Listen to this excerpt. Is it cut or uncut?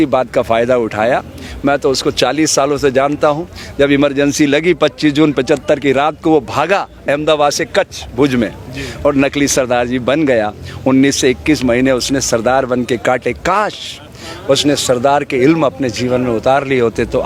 uncut